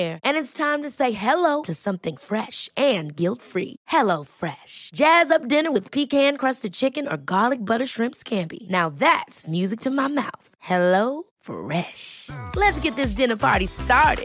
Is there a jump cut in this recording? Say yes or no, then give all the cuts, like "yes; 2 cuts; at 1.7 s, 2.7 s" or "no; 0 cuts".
no; 0 cuts